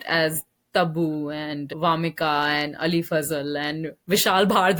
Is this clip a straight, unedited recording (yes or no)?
yes